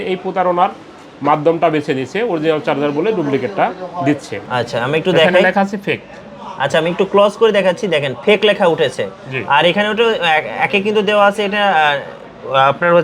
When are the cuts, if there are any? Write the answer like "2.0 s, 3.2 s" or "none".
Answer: 4.3 s